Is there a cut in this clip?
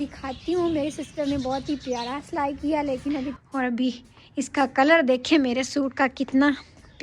yes; 1 cut; at 3.3 s

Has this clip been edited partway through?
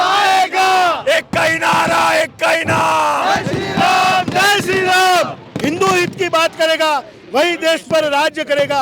yes; 1 cut; at 5.5 s

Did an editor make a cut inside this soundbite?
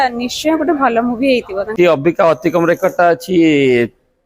yes; 1 cut; at 1.7 s

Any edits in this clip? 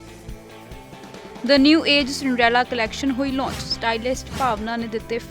yes; 1 cut; at 1.0 s

